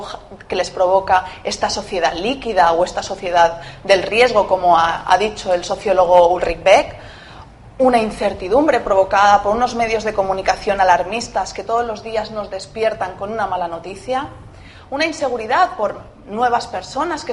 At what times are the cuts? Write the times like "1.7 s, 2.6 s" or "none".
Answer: 8.6 s